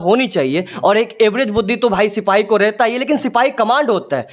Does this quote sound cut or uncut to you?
uncut